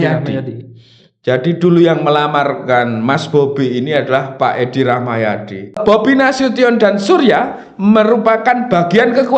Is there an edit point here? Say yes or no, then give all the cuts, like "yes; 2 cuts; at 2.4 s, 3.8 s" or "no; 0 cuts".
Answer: yes; 1 cut; at 5.8 s